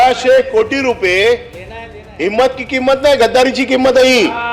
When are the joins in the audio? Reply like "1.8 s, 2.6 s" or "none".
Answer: none

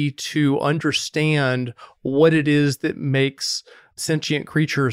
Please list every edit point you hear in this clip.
none

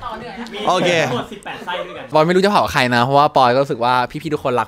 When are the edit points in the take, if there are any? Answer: 2.1 s

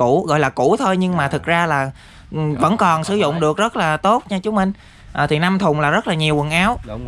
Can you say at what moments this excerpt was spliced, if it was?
none

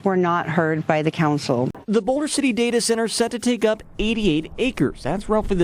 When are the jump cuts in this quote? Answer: 1.8 s

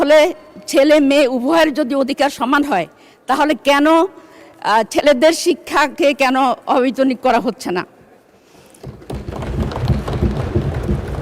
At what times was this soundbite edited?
none

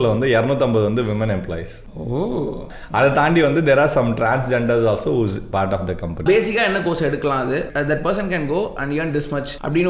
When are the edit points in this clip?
2.8 s, 6.2 s, 7.7 s

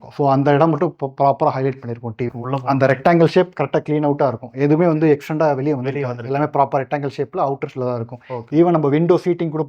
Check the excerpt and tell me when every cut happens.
2.3 s

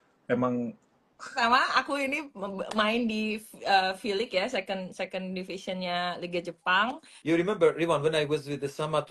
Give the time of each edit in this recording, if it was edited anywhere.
1.3 s, 7.1 s

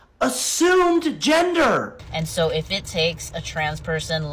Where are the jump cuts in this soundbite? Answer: 2.0 s

